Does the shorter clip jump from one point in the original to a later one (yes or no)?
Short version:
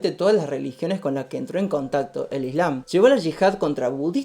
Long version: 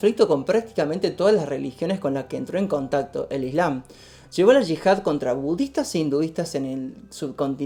yes